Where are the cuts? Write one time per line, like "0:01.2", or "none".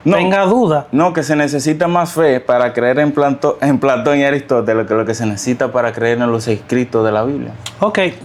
none